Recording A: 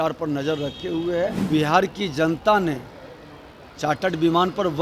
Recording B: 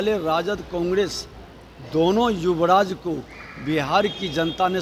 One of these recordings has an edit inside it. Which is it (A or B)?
A